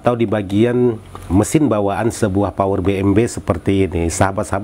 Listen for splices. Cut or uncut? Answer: uncut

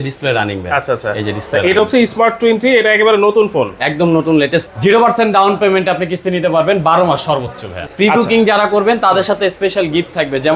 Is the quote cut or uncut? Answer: cut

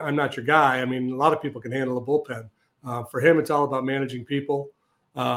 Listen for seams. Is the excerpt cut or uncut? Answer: uncut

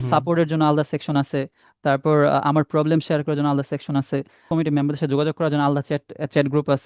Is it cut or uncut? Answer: cut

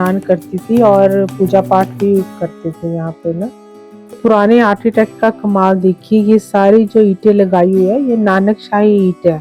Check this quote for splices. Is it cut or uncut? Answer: cut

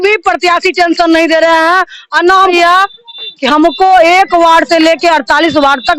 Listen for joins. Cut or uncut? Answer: cut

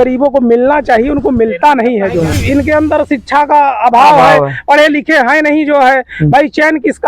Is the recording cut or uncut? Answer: cut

